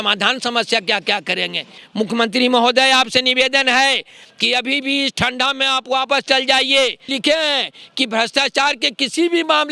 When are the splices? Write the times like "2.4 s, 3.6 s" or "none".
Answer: 1.8 s, 7.1 s